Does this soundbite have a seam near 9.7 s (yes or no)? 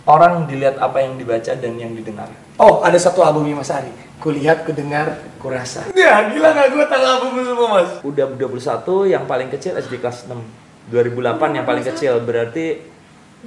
no